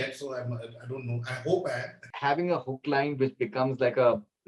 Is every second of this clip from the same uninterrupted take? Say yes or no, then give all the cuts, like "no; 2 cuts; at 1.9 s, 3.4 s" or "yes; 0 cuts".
no; 1 cut; at 2.0 s